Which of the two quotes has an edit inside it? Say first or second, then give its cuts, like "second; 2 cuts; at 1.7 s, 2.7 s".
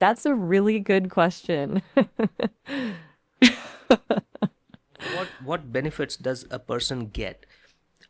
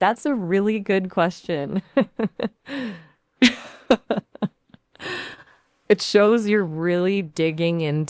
first; 1 cut; at 5.3 s